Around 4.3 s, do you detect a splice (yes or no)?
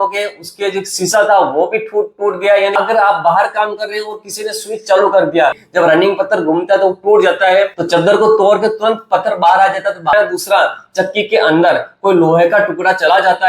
no